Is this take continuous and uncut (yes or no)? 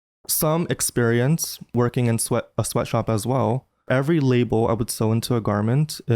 no